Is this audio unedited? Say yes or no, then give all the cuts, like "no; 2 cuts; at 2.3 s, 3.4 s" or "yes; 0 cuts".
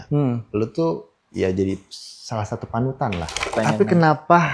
no; 2 cuts; at 1.2 s, 3.5 s